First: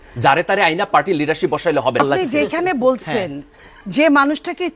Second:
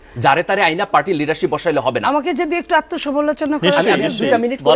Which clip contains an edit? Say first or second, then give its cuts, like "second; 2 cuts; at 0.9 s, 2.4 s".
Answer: first; 1 cut; at 2.0 s